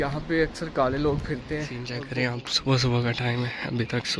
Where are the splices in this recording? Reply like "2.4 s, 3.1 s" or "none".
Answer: 2.0 s